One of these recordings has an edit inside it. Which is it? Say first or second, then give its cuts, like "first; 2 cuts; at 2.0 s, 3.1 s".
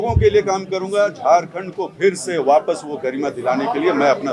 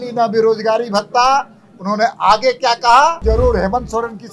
second; 1 cut; at 3.2 s